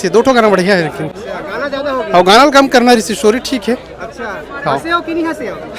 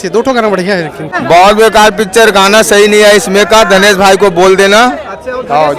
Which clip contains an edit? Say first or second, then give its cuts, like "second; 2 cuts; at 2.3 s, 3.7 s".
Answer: second; 1 cut; at 1.1 s